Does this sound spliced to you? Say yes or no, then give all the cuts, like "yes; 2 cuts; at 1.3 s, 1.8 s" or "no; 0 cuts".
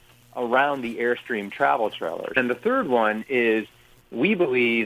yes; 1 cut; at 2.4 s